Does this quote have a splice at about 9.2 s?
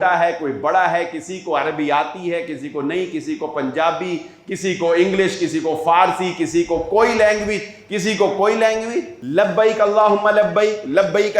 yes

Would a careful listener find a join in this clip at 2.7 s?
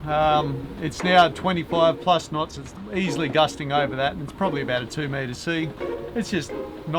no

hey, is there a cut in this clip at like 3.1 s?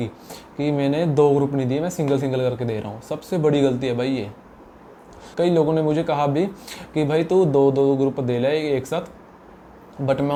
no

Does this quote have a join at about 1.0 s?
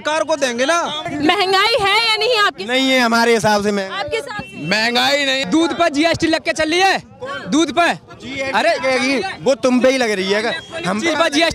yes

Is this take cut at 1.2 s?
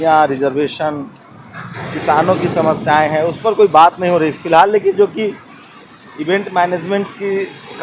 no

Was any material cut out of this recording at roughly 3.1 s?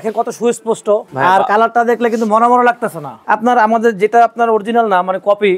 yes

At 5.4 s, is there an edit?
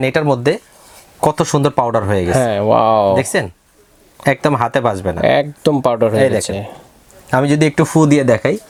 no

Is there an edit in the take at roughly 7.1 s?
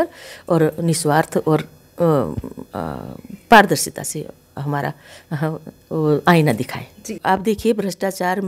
yes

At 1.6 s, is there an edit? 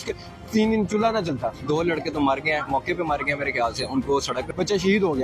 yes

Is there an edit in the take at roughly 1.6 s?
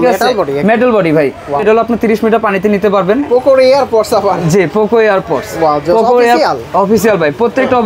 yes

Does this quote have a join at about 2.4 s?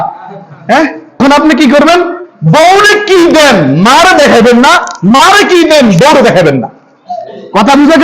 no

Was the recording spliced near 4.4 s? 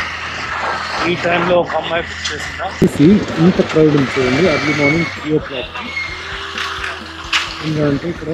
no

